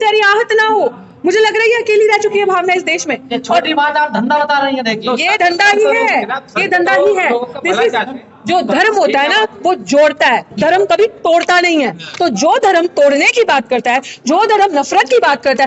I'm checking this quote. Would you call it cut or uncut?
uncut